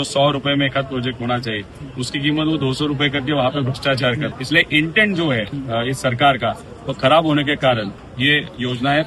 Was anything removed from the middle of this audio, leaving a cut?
yes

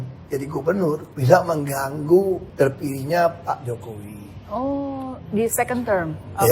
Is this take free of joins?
no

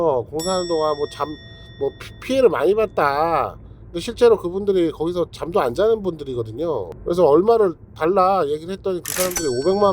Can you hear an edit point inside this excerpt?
yes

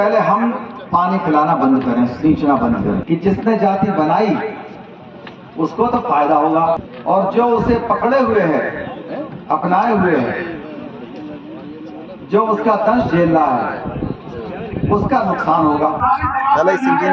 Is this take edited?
yes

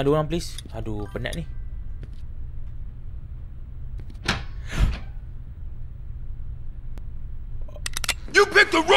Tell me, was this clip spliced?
no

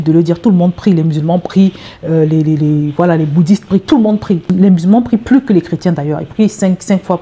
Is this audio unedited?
no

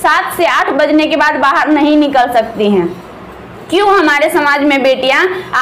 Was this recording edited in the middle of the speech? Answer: no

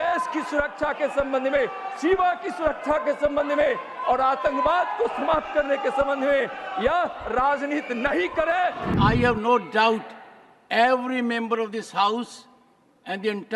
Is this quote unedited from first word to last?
no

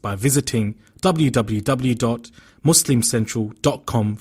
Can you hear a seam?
no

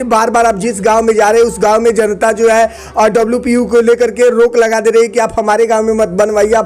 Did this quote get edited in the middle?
no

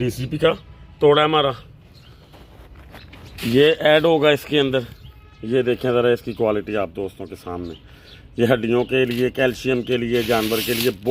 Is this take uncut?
yes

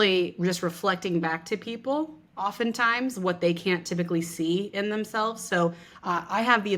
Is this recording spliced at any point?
no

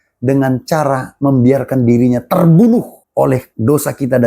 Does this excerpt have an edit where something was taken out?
yes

